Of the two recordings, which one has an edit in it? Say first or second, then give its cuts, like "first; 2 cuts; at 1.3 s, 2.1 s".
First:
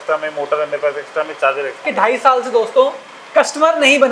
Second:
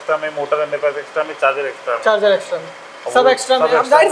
first; 1 cut; at 1.8 s